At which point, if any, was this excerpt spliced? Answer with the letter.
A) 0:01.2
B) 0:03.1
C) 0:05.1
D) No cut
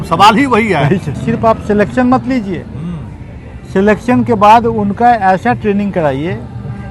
A